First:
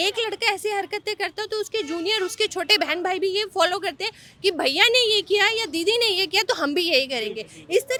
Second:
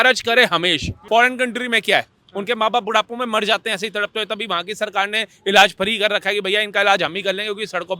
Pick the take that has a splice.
second; 1 cut; at 1.0 s

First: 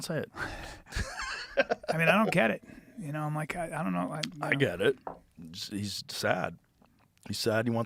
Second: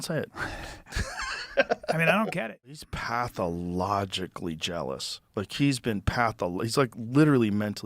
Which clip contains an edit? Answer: second; 1 cut; at 2.4 s

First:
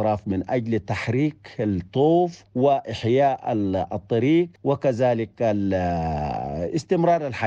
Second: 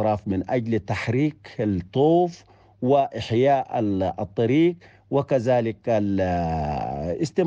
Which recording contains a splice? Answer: first; 2 cuts; at 2.4 s, 4.5 s

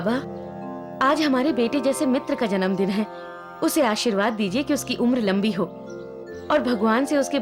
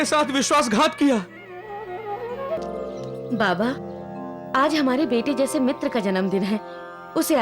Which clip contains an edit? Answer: second; 1 cut; at 2.6 s

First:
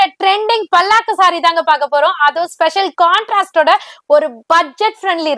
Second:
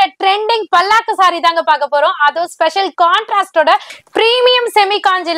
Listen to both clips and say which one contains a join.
second; 1 cut; at 3.9 s

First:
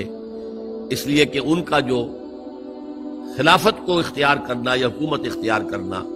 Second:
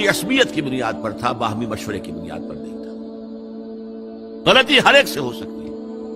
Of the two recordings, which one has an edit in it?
second; 2 cuts; at 2.1 s, 4.3 s

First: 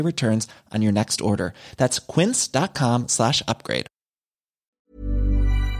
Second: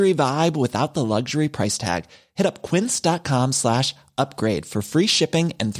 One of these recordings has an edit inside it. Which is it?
first; 1 cut; at 4.9 s

